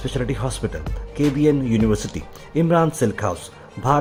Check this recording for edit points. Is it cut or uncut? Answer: uncut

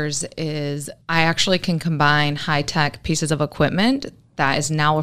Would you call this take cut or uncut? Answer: cut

